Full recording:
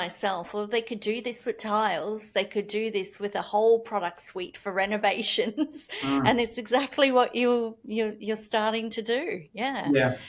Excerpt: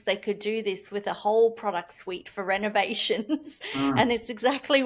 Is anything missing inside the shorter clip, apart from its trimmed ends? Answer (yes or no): no